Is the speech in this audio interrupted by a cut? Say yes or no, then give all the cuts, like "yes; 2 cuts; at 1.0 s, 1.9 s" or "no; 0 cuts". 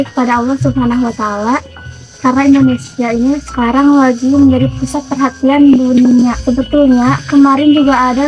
yes; 1 cut; at 6.4 s